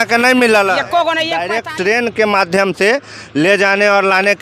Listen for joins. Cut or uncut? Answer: cut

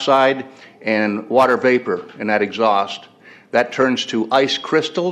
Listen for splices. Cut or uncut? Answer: uncut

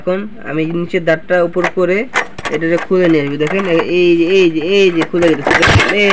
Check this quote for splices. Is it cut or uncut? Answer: uncut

